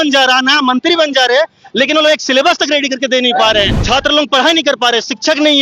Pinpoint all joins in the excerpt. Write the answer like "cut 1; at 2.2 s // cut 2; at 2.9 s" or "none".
cut 1; at 3.8 s